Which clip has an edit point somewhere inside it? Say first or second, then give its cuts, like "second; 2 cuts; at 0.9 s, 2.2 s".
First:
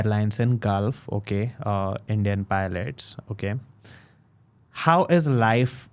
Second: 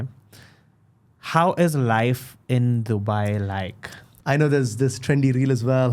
second; 1 cut; at 4.2 s